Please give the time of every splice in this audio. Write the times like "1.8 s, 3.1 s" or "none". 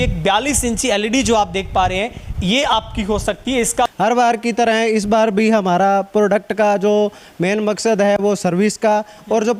3.9 s